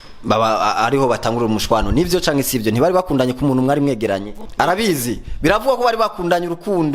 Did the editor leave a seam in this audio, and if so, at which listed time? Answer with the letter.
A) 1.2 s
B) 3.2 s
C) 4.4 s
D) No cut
C